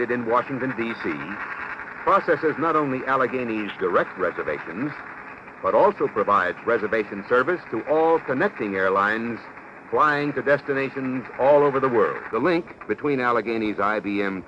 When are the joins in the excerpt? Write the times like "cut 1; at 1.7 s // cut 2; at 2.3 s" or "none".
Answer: cut 1; at 12.2 s